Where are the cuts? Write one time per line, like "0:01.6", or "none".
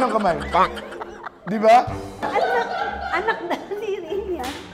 0:02.1